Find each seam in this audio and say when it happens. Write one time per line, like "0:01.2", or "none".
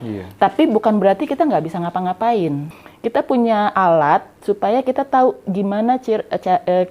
0:02.7